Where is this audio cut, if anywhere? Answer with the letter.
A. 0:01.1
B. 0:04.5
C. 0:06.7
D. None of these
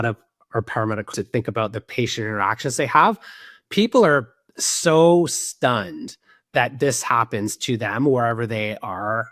A